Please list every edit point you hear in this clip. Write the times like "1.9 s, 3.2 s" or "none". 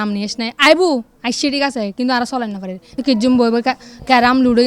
2.8 s